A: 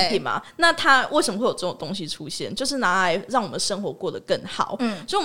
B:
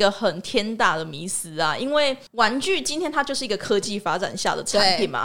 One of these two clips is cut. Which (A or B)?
B